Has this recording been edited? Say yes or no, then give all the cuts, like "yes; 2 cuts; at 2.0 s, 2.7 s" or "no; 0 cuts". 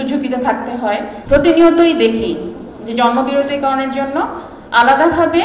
yes; 1 cut; at 1.1 s